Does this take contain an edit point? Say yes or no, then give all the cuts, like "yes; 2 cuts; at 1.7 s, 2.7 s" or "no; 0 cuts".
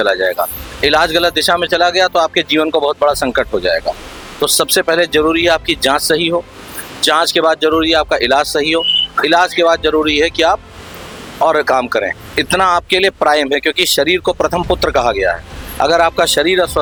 no; 0 cuts